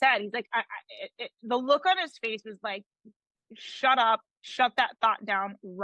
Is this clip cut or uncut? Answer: uncut